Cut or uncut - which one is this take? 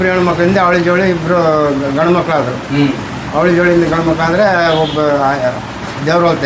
uncut